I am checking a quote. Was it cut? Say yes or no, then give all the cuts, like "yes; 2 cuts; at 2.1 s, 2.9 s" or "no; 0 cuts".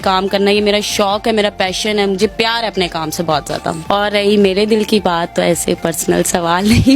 yes; 1 cut; at 3.8 s